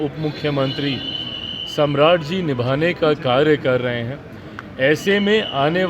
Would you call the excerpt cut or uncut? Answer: uncut